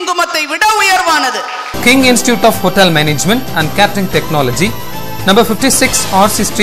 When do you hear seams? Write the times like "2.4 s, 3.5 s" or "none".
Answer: 1.7 s